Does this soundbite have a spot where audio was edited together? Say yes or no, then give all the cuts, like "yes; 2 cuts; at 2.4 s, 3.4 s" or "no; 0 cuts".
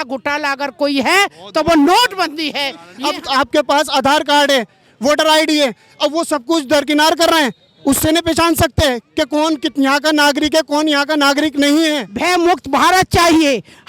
yes; 2 cuts; at 2.9 s, 12.1 s